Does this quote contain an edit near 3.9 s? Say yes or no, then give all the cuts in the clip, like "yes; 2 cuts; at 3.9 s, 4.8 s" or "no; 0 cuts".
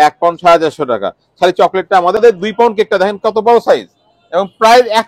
no; 1 cut; at 2.2 s